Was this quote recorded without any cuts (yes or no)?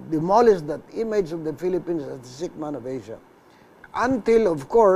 no